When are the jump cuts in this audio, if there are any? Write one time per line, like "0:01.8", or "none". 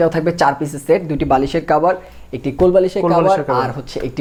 none